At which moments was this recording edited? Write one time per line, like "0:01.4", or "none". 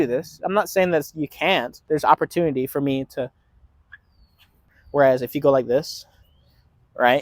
0:01.8
0:04.7